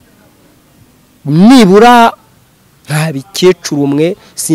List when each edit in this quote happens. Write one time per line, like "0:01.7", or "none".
0:02.2